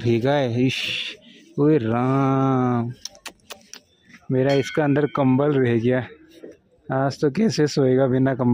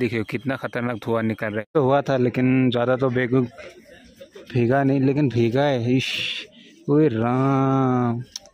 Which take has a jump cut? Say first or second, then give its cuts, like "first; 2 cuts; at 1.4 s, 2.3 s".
second; 1 cut; at 1.7 s